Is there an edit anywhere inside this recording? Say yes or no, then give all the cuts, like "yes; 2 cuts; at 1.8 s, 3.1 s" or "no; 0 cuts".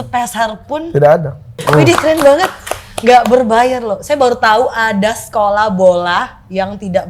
yes; 1 cut; at 1.5 s